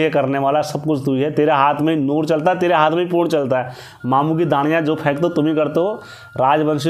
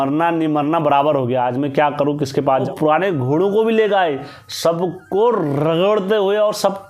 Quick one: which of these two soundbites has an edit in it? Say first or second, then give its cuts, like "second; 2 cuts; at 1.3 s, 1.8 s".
second; 1 cut; at 2.7 s